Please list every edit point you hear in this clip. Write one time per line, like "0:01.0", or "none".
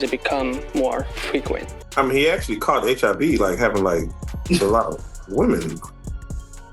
0:01.7